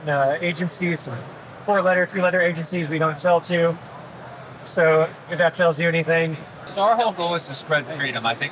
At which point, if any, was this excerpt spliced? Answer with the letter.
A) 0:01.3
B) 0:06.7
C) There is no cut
B